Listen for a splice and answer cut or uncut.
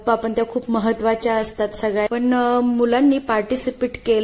cut